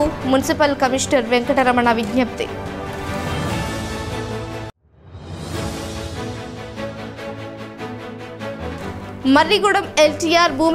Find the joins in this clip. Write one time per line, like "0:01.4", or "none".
none

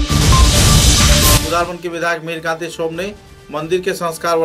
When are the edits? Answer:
0:01.4

